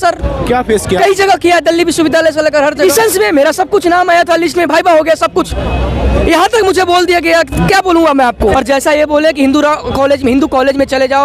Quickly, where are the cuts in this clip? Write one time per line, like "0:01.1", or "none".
0:02.8
0:08.5